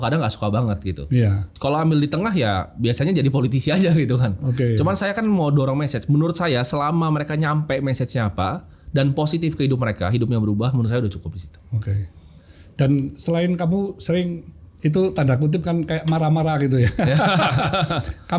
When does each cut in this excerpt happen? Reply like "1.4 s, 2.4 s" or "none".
none